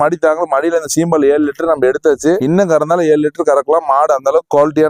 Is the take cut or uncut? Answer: uncut